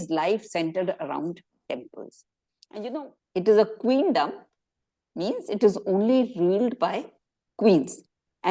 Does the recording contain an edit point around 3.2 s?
yes; 1 cut; at 3.2 s

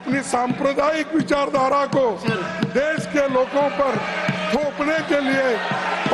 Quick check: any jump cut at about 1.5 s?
no; 0 cuts

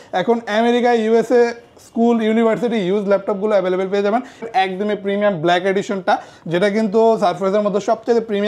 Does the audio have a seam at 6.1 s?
no; 1 cut; at 4.5 s

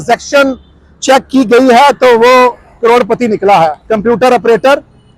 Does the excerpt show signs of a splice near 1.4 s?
no; 2 cuts; at 2.7 s, 3.8 s

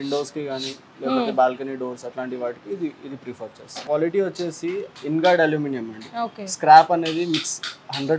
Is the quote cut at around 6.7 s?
no; 1 cut; at 3.7 s

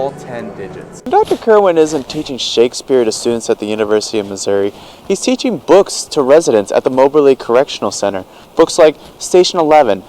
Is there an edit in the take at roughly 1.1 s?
yes; 1 cut; at 1.1 s

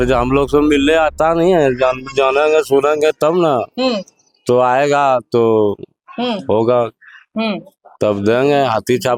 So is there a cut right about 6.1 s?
no; 0 cuts

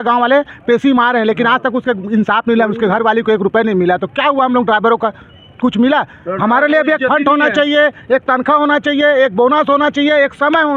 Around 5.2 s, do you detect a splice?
no; 0 cuts

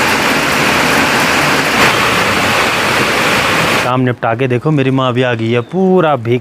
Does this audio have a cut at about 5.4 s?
no; 2 cuts; at 1.8 s, 3.8 s

